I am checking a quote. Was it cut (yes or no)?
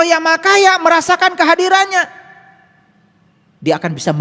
no